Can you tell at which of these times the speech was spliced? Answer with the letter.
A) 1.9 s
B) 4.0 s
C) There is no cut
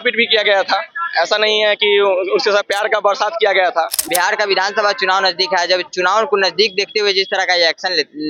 B